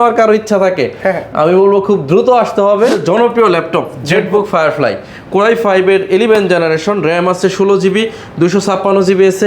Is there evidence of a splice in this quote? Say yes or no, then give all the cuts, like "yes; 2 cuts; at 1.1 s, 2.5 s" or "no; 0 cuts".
yes; 1 cut; at 3.0 s